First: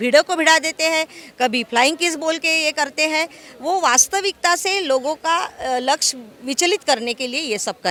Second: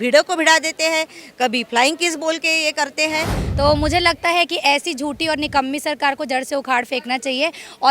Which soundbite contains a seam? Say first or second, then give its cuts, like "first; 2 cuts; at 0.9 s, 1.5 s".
second; 1 cut; at 3.4 s